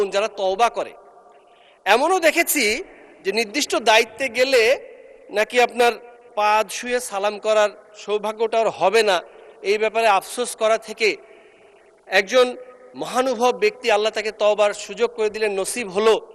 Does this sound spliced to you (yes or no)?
no